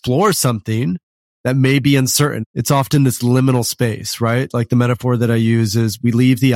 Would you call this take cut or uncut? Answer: cut